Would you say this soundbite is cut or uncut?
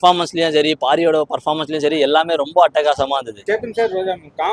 uncut